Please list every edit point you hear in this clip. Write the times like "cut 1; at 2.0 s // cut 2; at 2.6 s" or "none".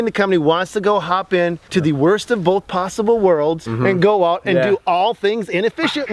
cut 1; at 1.6 s // cut 2; at 3.7 s

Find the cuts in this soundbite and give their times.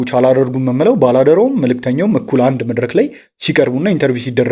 none

